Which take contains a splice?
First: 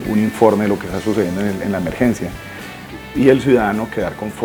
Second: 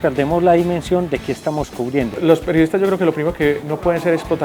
second; 1 cut; at 2.1 s

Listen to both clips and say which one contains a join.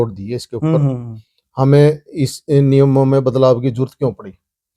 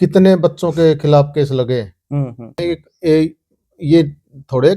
second; 1 cut; at 2.6 s

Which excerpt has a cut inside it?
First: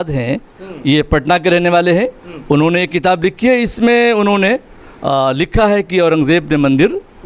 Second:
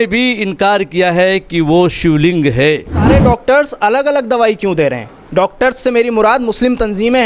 second; 1 cut; at 3.1 s

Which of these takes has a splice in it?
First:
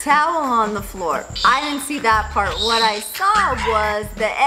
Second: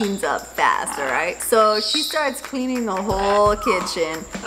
first; 1 cut; at 1.3 s

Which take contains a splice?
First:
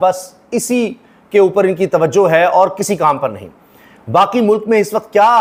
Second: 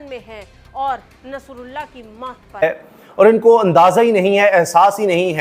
second; 1 cut; at 2.6 s

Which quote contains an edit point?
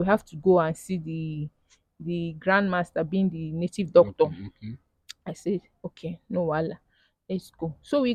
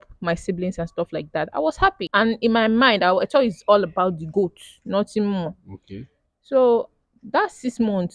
second; 1 cut; at 2.0 s

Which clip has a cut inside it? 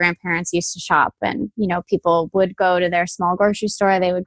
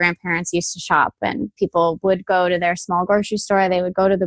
second; 1 cut; at 1.5 s

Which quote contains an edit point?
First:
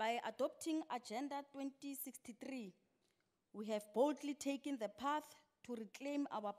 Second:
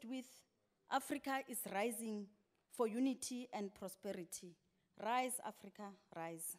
first; 1 cut; at 2.0 s

